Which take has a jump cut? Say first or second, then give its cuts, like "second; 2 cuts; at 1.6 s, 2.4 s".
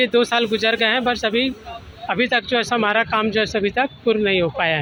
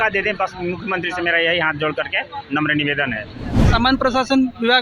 second; 1 cut; at 3.5 s